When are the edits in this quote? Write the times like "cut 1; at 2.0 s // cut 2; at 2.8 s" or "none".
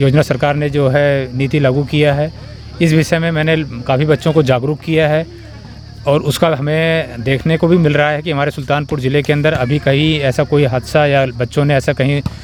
none